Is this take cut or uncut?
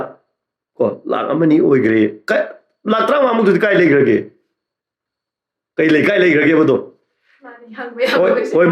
uncut